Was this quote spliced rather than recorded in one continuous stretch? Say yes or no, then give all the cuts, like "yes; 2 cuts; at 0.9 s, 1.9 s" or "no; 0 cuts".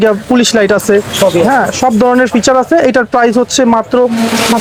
no; 0 cuts